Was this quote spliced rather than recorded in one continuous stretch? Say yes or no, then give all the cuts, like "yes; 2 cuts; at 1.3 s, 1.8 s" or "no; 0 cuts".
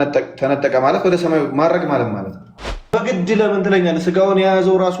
yes; 1 cut; at 2.9 s